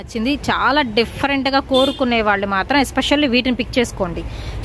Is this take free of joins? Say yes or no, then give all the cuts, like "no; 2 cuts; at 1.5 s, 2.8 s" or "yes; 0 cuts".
yes; 0 cuts